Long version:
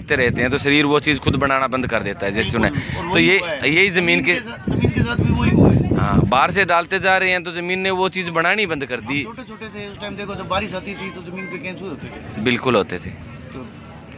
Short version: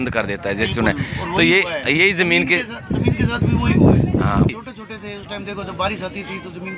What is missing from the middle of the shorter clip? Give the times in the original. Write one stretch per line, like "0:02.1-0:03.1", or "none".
0:06.3-0:09.2